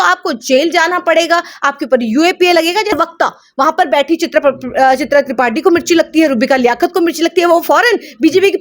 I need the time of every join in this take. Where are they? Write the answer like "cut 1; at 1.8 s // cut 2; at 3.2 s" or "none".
cut 1; at 2.9 s